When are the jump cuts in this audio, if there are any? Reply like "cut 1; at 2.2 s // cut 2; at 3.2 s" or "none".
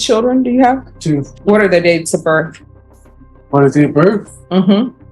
cut 1; at 1.3 s